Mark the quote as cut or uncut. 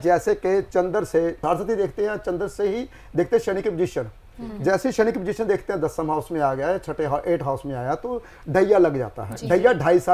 uncut